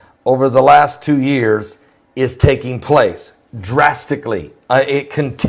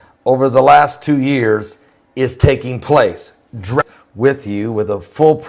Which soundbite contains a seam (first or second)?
first